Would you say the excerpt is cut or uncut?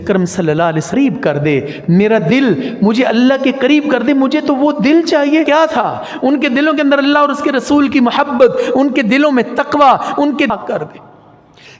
cut